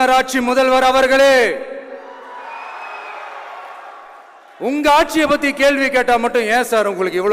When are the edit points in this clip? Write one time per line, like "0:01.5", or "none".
none